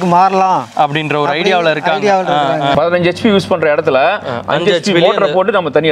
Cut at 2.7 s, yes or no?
yes